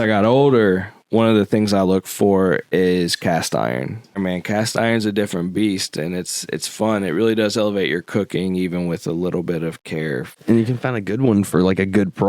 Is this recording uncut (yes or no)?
no